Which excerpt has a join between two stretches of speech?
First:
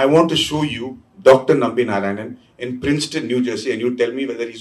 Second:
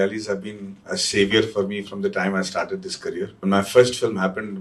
second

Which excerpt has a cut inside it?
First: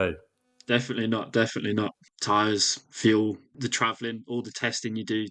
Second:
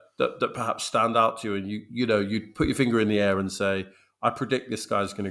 first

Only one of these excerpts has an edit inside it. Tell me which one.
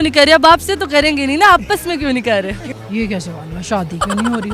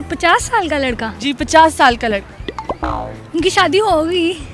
first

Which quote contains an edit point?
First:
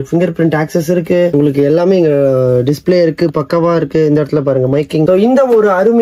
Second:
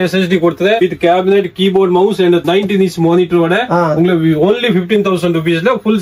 first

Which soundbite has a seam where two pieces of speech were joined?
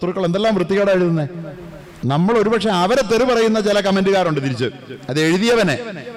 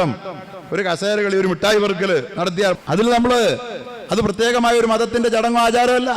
second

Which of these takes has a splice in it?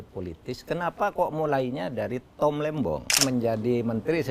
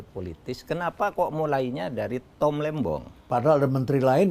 first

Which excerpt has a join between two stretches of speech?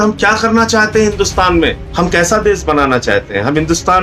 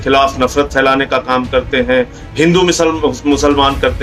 first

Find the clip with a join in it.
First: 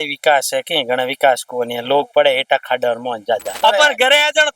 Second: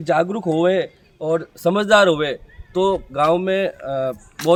first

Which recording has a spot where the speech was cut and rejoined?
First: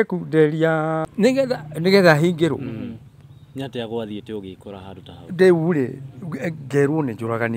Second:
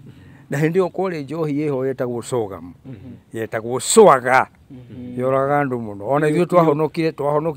first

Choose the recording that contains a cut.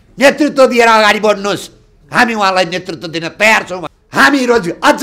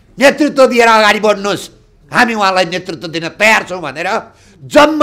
first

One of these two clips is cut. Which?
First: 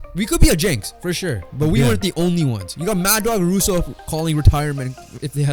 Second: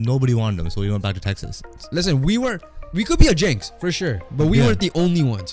second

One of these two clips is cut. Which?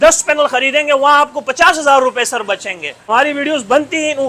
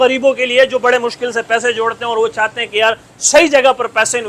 first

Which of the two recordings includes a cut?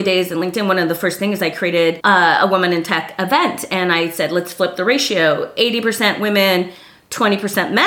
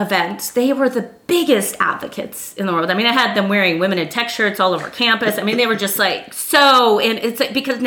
first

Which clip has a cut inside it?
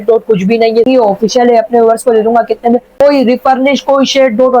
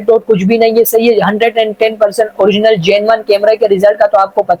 first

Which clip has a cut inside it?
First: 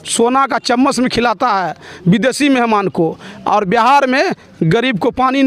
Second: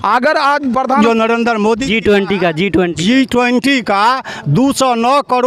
second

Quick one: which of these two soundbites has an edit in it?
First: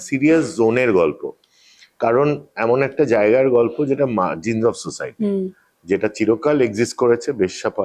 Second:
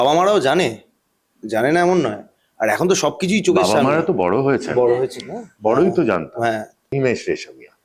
second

